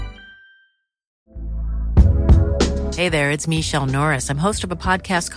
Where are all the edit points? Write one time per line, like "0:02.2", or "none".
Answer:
0:01.1